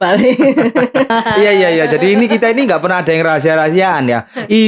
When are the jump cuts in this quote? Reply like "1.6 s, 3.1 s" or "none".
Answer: 1.1 s